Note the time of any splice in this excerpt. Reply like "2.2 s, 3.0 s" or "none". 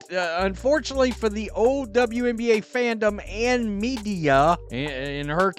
4.7 s